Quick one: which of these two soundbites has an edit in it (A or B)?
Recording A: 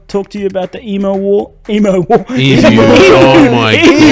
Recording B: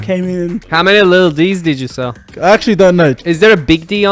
B